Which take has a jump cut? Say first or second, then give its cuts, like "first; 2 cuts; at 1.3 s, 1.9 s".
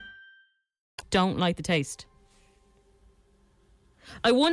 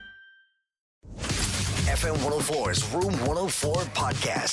second; 1 cut; at 1.1 s